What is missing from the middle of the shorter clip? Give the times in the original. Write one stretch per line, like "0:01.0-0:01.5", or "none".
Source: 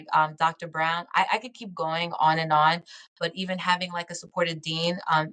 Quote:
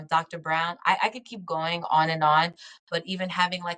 none